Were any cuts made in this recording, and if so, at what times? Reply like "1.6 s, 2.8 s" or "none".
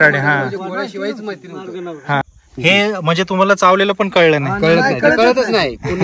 2.2 s